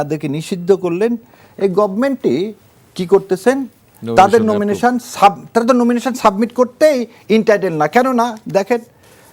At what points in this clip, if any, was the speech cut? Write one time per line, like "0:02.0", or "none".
none

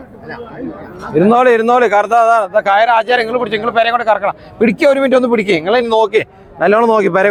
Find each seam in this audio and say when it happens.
none

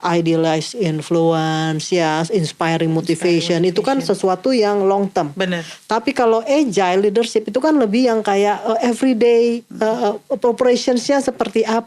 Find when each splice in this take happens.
none

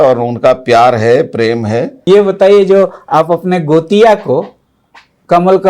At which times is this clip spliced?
0:01.9

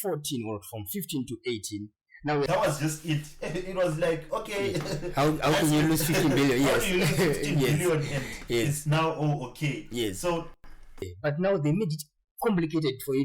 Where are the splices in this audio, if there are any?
0:02.5
0:11.0

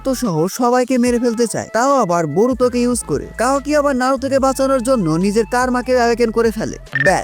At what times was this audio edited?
0:01.6

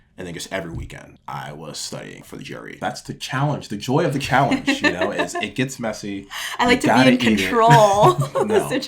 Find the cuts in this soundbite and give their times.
0:01.1
0:02.6

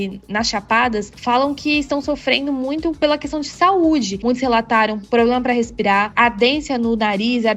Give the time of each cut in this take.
0:04.2
0:06.1

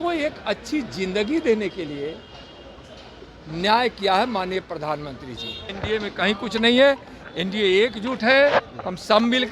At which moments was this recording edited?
0:05.7

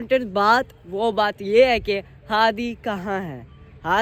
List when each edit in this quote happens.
none

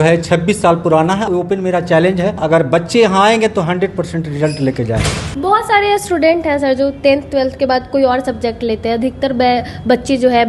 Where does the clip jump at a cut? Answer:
0:01.3
0:02.4
0:05.2

